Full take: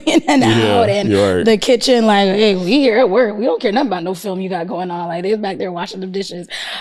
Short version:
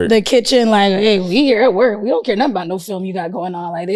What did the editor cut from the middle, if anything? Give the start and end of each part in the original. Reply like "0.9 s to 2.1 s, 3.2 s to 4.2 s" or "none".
none